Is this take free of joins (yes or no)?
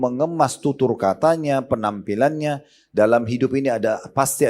yes